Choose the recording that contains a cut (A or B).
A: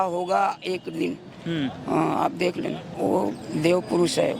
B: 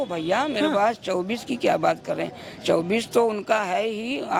A